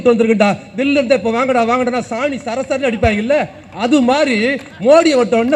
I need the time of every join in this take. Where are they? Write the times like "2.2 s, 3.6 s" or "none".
none